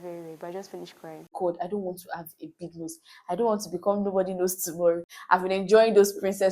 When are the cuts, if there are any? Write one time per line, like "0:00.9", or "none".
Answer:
0:01.3
0:05.1